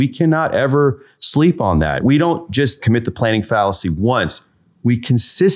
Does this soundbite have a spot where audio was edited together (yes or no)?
yes